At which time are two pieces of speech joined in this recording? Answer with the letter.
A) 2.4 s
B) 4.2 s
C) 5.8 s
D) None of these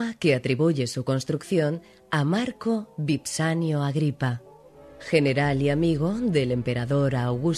B